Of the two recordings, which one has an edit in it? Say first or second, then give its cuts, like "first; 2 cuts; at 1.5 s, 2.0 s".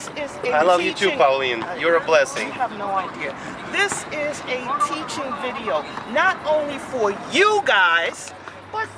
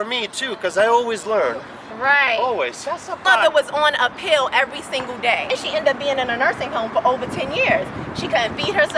second; 2 cuts; at 3.2 s, 5.5 s